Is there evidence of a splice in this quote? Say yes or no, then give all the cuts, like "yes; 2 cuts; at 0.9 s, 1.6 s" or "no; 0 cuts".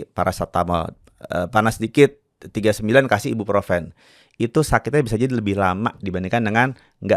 no; 0 cuts